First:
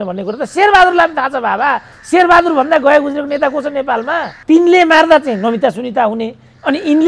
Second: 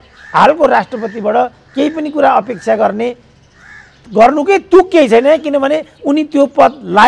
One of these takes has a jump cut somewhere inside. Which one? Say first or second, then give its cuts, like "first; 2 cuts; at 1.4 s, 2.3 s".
first; 1 cut; at 4.3 s